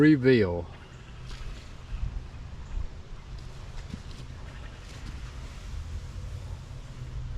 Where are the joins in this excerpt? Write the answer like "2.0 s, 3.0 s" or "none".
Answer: none